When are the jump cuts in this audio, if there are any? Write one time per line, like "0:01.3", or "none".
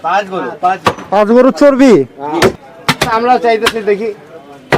0:02.6